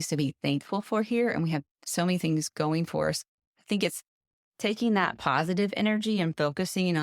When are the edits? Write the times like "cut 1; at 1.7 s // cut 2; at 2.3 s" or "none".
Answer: none